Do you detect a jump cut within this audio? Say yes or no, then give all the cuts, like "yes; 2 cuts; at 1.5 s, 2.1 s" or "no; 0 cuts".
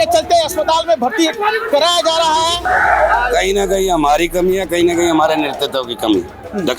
yes; 1 cut; at 2.6 s